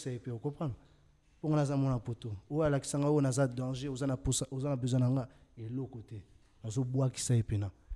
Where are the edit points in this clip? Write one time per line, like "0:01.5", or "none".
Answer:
none